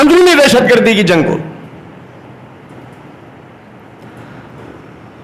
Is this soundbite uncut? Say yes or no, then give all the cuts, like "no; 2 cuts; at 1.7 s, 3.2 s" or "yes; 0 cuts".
yes; 0 cuts